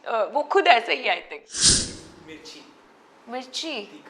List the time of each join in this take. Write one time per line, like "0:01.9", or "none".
0:01.7